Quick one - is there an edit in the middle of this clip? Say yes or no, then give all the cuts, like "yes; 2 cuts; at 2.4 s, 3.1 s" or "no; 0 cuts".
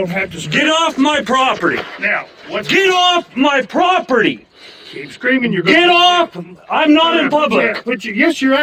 no; 0 cuts